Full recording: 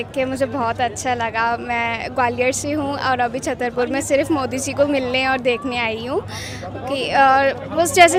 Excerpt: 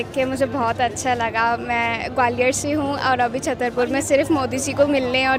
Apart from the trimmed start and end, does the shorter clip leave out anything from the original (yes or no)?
no